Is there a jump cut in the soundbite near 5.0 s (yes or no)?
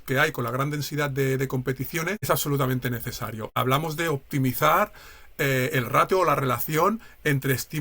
no